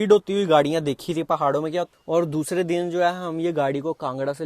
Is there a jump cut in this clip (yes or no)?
yes